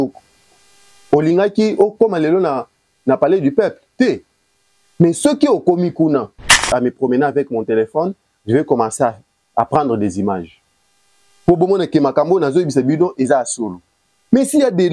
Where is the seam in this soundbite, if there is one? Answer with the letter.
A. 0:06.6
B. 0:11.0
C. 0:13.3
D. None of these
A